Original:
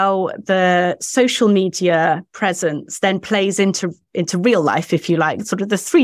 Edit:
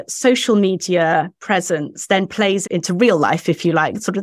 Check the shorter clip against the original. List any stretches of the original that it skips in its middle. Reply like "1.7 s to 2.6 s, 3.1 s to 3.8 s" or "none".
3.5 s to 4.0 s